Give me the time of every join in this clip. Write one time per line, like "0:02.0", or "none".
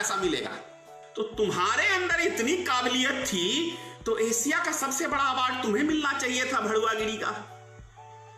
0:01.1